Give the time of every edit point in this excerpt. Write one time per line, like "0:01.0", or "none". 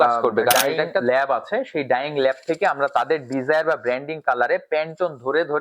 0:01.0